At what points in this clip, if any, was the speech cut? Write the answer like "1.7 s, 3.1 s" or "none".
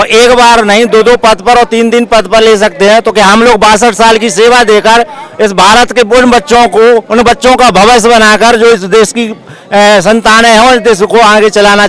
none